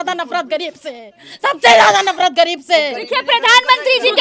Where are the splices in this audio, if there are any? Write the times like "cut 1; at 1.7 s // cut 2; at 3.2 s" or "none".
none